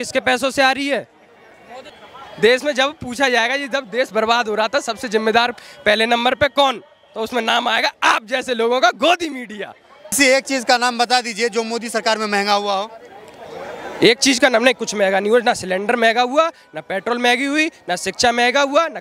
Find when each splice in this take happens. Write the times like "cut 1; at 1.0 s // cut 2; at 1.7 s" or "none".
cut 1; at 2.0 s // cut 2; at 10.2 s